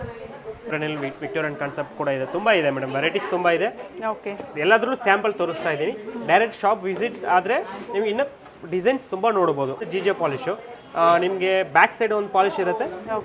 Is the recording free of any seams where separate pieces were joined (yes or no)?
no